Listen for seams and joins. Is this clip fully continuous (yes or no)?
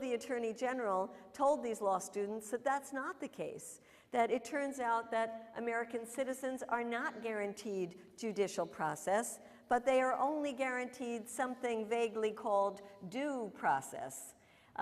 no